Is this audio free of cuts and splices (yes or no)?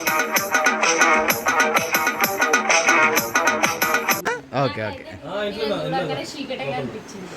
no